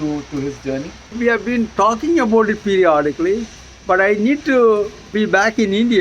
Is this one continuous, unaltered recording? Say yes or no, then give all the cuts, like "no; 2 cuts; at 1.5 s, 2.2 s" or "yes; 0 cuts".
no; 2 cuts; at 1.2 s, 5.0 s